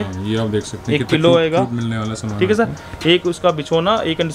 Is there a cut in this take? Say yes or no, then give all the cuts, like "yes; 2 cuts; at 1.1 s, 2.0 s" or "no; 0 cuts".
no; 0 cuts